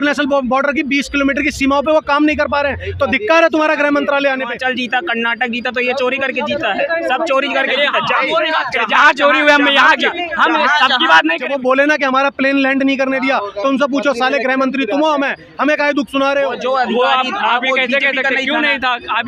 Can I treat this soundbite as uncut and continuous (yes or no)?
no